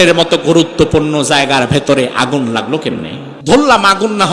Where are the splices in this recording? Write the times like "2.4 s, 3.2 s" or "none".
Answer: 3.3 s